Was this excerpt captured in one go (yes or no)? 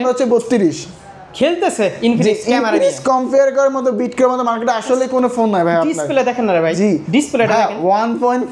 yes